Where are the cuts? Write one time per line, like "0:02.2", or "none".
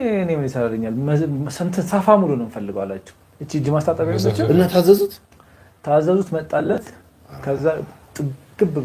none